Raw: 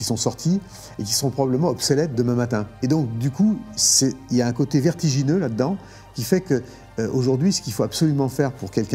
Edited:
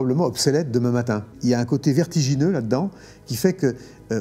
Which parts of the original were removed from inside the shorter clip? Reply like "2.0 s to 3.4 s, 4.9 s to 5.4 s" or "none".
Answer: 2.8 s to 4.2 s